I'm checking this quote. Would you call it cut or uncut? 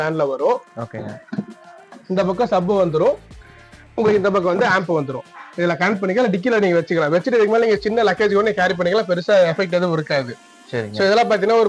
uncut